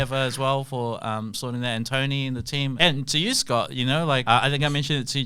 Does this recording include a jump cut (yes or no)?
yes